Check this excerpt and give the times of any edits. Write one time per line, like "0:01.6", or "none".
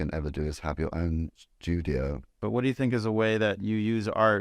0:01.5
0:02.4